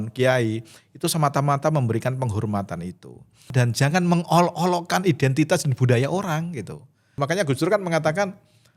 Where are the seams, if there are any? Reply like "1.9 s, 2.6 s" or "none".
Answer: 3.5 s, 7.1 s